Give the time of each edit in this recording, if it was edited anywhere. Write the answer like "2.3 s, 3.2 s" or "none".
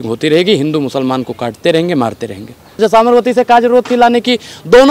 2.8 s